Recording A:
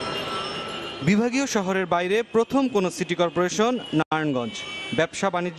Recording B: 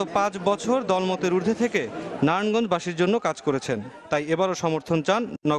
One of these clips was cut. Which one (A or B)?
A